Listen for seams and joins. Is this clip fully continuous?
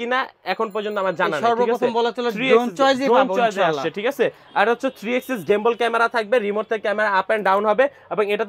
yes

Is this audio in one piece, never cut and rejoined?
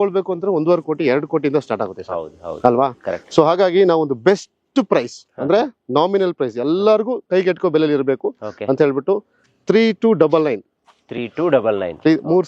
yes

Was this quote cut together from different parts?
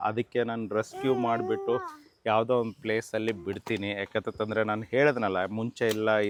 no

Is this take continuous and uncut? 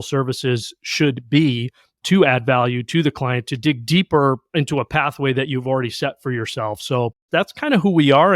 no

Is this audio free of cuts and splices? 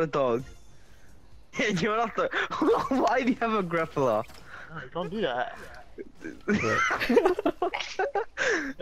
no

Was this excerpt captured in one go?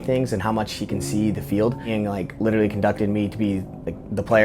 no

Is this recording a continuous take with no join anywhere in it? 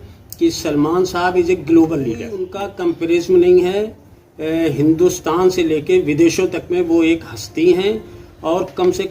no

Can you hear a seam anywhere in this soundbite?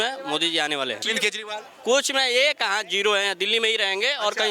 yes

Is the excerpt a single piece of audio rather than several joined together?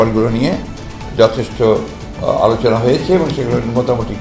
yes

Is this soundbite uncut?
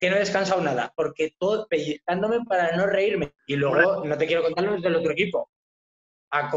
no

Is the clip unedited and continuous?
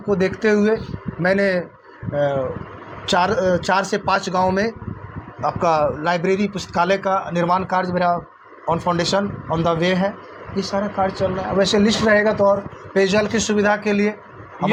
yes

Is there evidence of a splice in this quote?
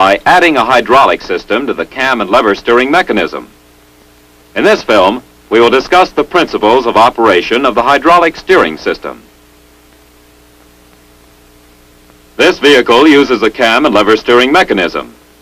no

